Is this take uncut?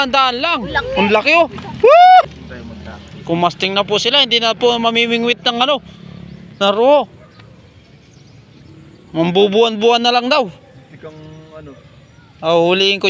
no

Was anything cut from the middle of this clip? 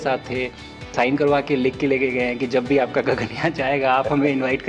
yes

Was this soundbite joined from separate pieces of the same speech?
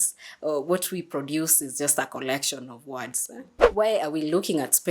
yes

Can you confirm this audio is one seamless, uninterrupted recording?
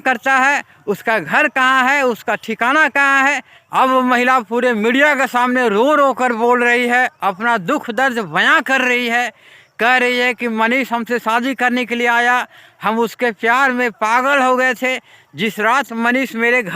no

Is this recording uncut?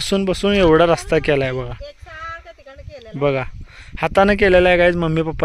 yes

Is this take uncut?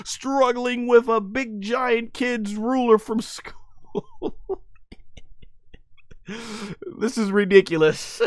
yes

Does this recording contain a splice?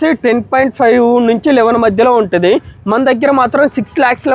no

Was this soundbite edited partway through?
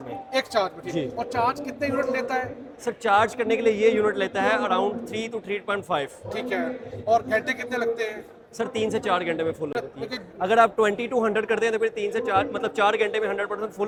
no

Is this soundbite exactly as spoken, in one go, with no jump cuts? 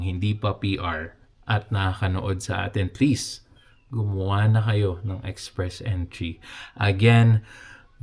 yes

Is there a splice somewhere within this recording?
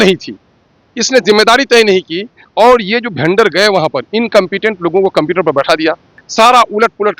yes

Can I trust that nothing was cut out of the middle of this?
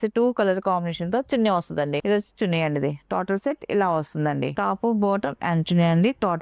no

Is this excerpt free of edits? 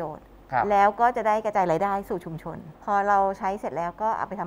no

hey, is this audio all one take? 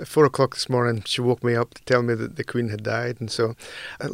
yes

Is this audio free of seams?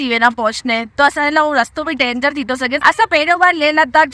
yes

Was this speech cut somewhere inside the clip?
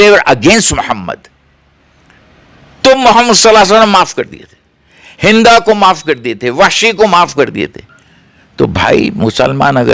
no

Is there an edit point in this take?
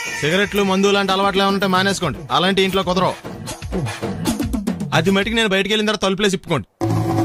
no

